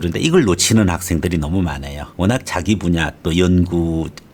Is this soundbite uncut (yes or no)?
yes